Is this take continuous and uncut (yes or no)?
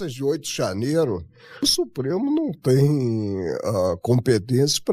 no